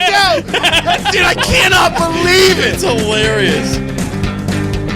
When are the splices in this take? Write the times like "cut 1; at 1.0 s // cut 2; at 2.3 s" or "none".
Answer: cut 1; at 3.4 s